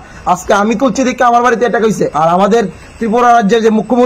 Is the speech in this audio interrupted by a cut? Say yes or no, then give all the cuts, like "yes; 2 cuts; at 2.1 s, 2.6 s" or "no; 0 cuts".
yes; 1 cut; at 2.1 s